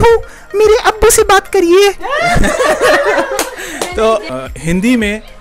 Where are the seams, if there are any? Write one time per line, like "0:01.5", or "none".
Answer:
0:04.2

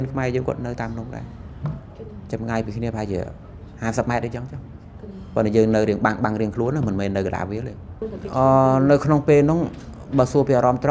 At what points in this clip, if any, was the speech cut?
0:08.2

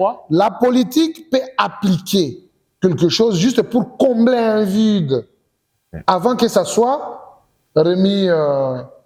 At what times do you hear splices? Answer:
none

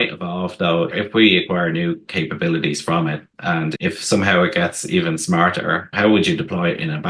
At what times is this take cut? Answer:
0:00.9
0:03.7

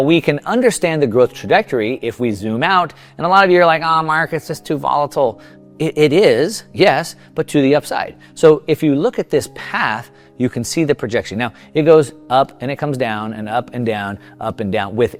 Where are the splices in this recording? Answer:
none

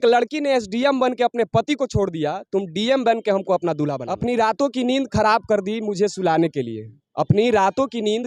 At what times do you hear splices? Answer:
0:04.0

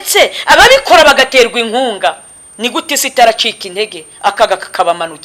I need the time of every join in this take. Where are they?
none

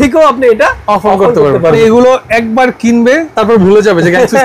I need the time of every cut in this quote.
0:01.8
0:03.3

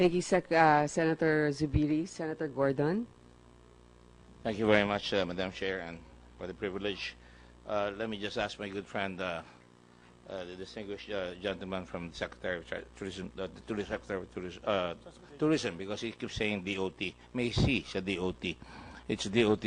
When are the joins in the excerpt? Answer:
none

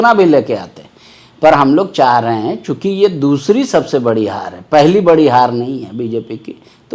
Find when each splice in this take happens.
none

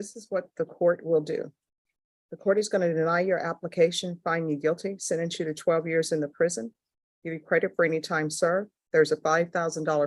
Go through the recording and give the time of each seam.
none

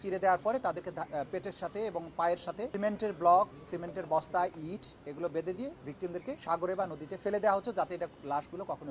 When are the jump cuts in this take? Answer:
0:02.7
0:03.6
0:06.4

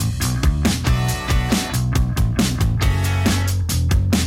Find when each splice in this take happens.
0:01.8

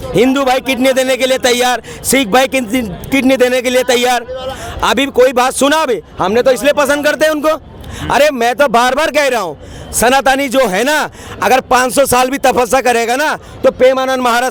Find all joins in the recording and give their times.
none

